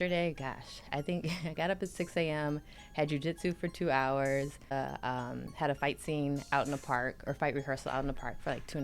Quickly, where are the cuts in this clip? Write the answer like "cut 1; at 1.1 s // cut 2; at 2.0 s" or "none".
cut 1; at 4.7 s